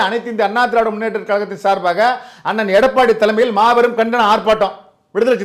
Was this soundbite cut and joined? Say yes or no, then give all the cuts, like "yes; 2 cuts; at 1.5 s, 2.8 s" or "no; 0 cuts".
no; 0 cuts